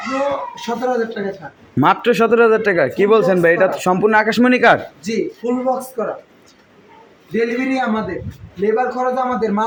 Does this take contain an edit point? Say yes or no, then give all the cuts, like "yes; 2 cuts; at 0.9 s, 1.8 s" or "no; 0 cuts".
no; 0 cuts